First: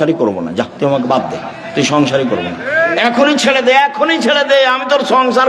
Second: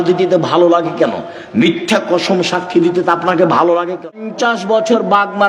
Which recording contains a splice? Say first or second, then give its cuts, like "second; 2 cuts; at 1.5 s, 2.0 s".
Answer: second; 1 cut; at 4.3 s